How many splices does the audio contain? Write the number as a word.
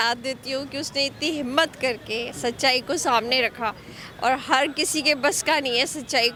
zero